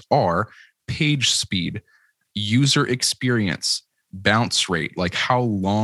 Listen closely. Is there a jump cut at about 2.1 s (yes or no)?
no